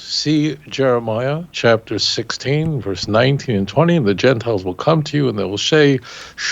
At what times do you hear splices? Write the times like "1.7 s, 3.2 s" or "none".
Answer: 1.5 s